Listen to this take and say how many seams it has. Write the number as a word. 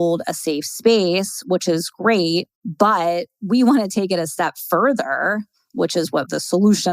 one